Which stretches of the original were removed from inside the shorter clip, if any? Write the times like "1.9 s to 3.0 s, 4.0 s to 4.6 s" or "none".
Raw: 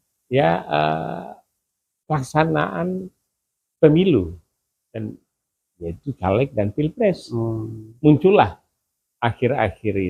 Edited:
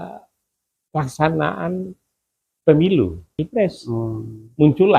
4.5 s to 6.8 s